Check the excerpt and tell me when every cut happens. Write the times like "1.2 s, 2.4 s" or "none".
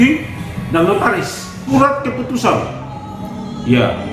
1.7 s